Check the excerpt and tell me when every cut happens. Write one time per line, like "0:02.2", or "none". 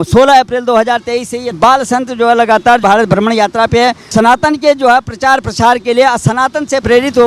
0:01.6
0:02.8

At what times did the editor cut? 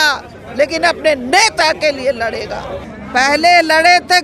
0:02.9

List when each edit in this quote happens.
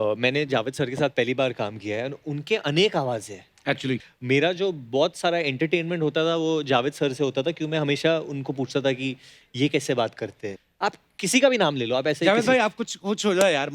0:04.1
0:10.5

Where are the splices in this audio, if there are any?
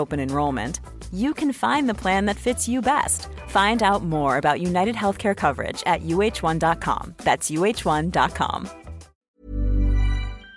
0:09.2

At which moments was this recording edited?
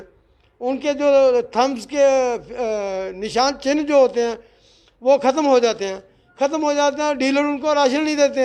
none

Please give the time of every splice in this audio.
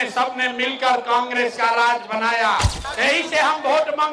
0:02.8

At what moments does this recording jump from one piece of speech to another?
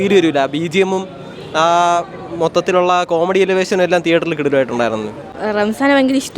0:05.3

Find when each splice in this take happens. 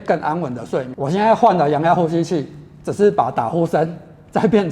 0:00.9

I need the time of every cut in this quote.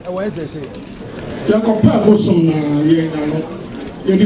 0:01.3

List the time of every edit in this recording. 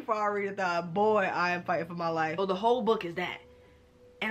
0:02.3

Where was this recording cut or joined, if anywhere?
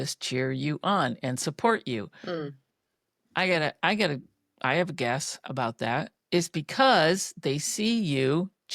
none

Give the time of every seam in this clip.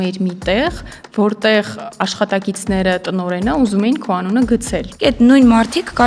0:04.9

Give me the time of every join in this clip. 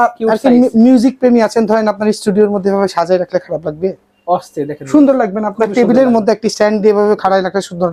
none

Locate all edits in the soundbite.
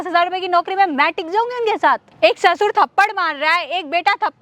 0:02.1

